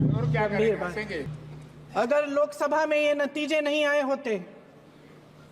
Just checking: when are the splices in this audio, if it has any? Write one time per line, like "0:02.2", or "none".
0:01.3